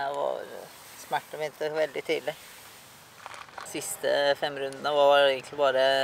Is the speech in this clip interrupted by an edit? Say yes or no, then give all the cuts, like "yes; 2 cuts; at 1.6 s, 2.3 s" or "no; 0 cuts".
yes; 1 cut; at 3.7 s